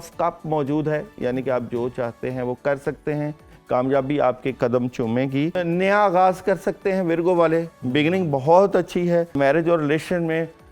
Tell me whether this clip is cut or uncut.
cut